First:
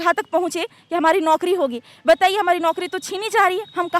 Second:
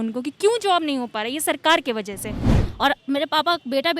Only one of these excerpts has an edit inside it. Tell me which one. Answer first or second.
second